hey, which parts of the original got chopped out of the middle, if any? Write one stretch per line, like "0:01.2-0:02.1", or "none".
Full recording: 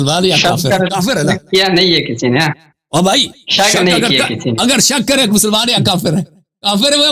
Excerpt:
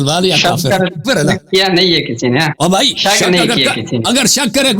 0:02.8-0:03.3